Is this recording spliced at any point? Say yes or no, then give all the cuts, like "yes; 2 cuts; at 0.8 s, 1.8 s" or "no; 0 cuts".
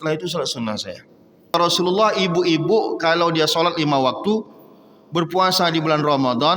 yes; 1 cut; at 1.5 s